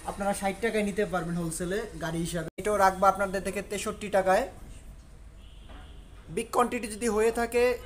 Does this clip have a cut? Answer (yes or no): yes